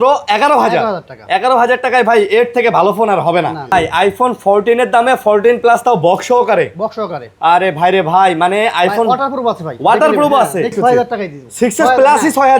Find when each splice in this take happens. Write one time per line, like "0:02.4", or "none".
0:03.7
0:10.7